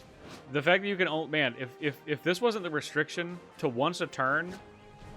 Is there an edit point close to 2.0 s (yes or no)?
no